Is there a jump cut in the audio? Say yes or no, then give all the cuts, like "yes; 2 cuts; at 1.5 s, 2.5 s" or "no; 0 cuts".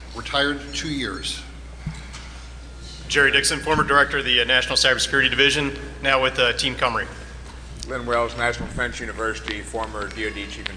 no; 0 cuts